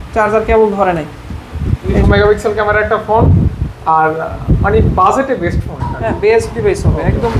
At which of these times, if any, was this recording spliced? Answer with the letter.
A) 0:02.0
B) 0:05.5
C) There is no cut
A